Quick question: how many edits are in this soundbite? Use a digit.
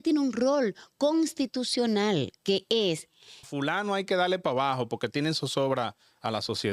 1